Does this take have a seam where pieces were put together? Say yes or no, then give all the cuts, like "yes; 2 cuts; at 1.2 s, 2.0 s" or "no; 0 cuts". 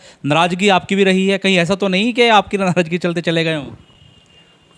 no; 0 cuts